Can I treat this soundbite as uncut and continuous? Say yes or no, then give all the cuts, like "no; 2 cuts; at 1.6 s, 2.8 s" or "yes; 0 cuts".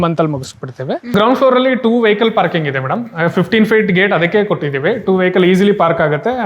no; 1 cut; at 1.0 s